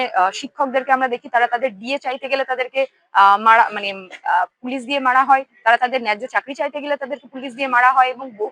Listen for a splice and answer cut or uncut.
uncut